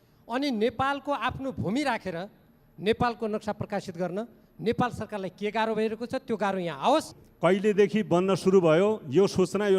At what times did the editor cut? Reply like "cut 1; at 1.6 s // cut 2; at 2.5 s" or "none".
cut 1; at 7.2 s

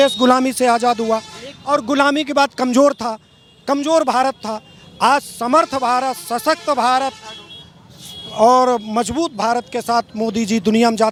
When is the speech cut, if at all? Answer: none

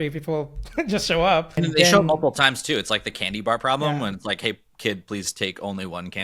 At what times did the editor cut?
cut 1; at 1.6 s

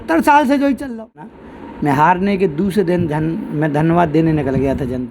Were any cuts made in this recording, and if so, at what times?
cut 1; at 1.4 s

